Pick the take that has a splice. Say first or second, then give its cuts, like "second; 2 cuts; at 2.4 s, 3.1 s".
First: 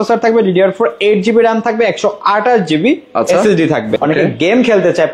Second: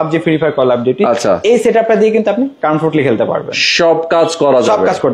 first; 1 cut; at 3.9 s